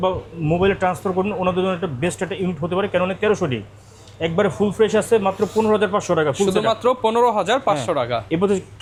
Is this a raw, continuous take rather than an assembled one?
yes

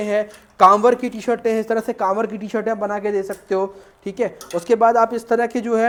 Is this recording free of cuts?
yes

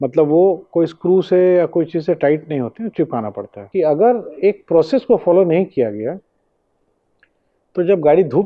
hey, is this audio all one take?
no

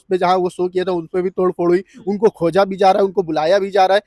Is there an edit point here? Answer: no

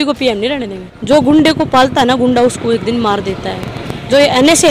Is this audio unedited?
no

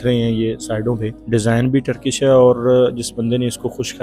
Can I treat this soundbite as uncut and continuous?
no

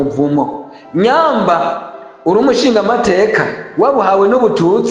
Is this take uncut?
yes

